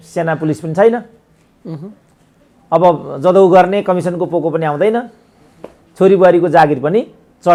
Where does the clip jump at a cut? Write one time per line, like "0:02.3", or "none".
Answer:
none